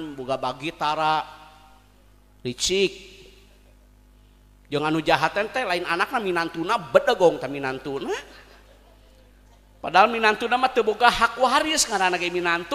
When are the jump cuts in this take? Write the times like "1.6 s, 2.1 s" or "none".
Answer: none